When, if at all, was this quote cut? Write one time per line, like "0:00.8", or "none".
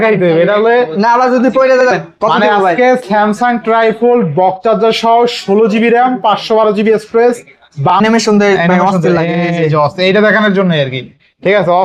0:01.9
0:08.0